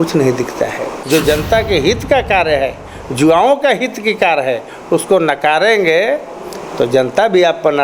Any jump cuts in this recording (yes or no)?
yes